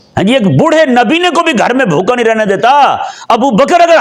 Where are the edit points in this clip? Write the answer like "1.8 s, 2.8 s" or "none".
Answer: none